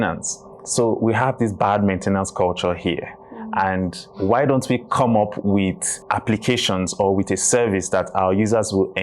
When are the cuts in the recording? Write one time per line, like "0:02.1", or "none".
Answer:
0:05.9